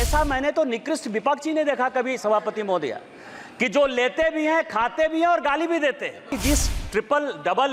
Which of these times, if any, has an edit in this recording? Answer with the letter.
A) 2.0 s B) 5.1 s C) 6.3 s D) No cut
C